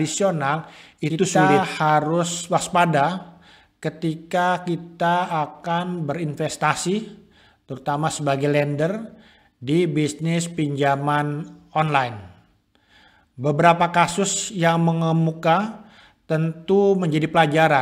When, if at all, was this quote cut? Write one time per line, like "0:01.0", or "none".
0:01.3